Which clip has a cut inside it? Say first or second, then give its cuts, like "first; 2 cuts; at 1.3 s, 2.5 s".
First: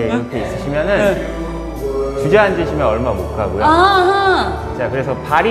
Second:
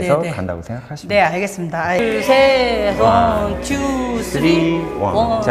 second; 1 cut; at 2.0 s